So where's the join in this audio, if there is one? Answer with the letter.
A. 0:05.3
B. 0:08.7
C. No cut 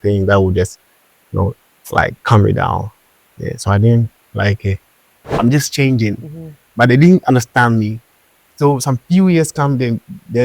A